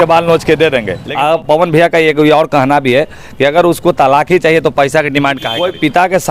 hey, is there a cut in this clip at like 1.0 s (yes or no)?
yes